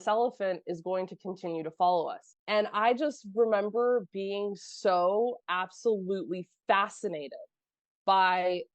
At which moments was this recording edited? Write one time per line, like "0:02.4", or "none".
0:02.2